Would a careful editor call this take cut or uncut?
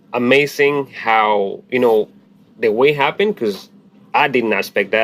uncut